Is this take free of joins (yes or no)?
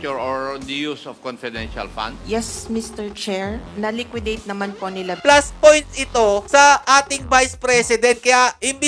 no